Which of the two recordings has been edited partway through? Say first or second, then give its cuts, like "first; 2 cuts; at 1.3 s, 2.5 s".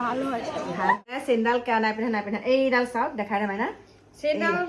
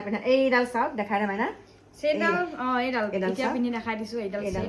first; 1 cut; at 1.2 s